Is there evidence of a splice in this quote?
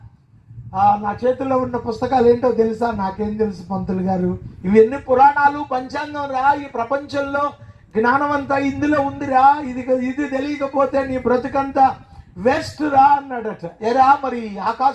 yes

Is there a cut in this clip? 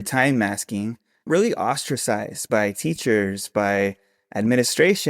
yes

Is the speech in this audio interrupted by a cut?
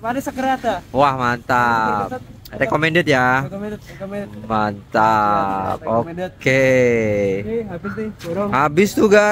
no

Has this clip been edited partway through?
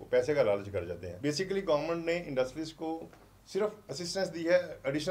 yes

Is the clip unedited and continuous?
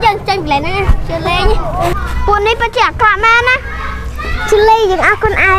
no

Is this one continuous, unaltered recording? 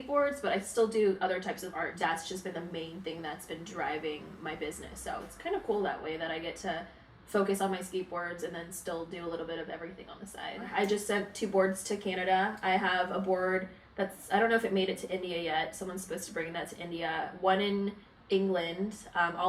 no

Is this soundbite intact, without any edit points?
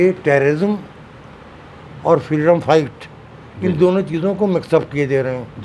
yes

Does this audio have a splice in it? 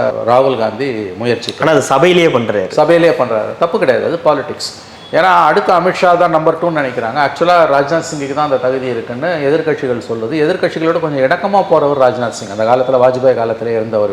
no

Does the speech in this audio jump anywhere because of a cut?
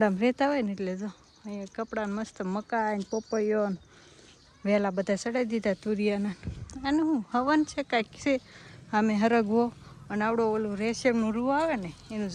no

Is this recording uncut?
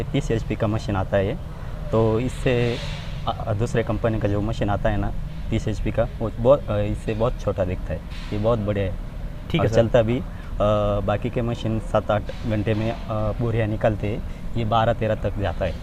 yes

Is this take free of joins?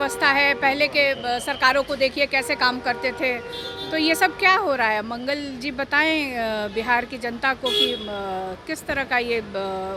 yes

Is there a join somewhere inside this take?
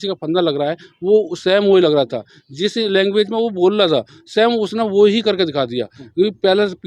no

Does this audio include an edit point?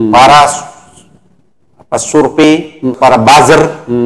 yes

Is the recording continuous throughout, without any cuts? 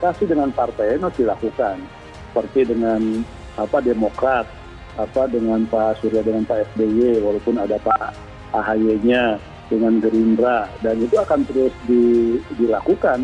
yes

